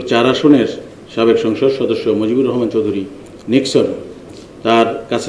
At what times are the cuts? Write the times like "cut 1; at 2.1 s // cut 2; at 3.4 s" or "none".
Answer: none